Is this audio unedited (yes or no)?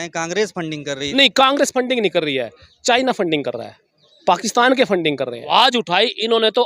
no